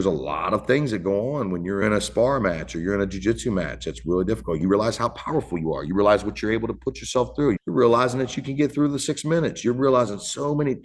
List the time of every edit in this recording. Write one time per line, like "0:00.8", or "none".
0:01.8
0:04.6
0:07.6